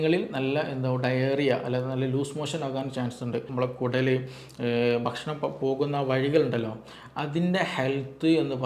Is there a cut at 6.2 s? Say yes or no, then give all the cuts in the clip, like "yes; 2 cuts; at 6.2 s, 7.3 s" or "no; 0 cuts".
no; 1 cut; at 3.5 s